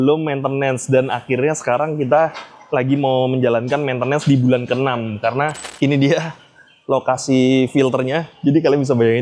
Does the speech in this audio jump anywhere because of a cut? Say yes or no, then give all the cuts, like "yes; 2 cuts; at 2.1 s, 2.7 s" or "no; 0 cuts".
yes; 1 cut; at 5.6 s